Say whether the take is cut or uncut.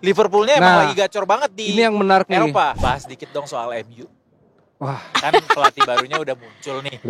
cut